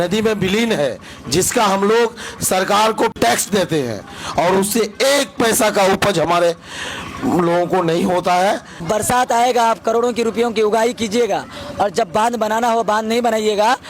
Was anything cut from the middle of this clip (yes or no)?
yes